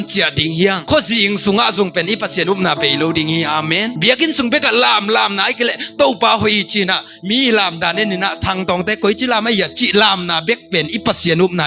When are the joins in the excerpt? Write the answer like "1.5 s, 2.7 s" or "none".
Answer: none